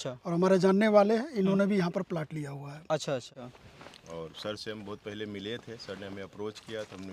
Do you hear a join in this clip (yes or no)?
yes